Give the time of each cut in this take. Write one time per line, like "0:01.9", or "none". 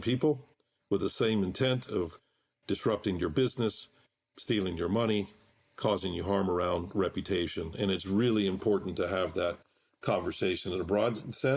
none